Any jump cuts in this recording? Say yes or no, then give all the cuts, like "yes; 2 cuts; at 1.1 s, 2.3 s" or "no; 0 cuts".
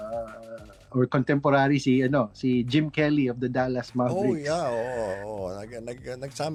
no; 0 cuts